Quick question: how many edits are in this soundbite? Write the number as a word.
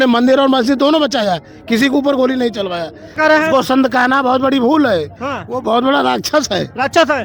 zero